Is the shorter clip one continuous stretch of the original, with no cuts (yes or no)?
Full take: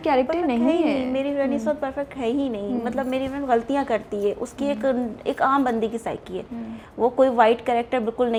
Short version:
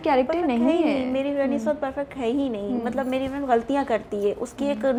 yes